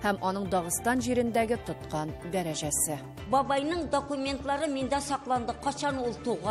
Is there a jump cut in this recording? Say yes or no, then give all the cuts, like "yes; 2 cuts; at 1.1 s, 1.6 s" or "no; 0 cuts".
yes; 1 cut; at 3.1 s